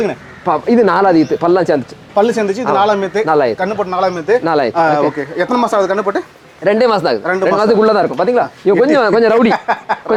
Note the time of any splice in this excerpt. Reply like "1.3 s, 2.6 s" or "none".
none

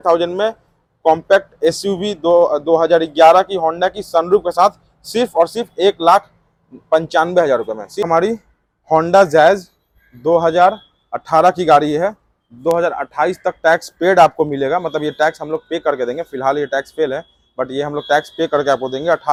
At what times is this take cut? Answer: none

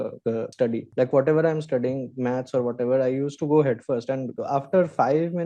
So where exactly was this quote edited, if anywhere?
none

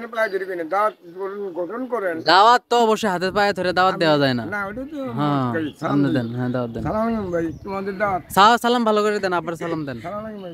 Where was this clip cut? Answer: none

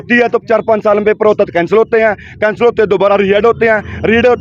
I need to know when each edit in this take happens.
none

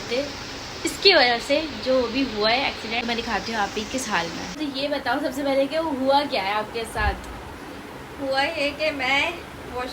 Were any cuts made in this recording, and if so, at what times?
4.6 s

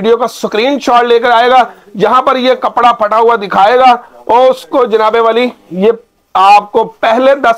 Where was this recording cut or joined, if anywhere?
none

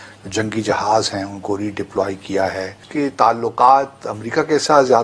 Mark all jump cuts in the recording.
2.8 s

